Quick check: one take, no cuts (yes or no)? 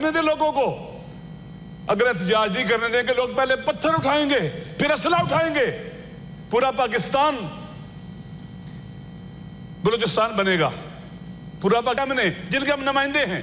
no